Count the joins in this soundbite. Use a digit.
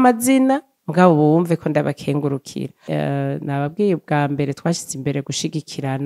1